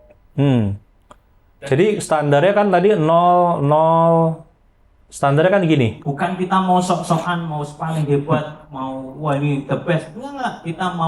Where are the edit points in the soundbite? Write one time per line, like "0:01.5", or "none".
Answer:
0:06.0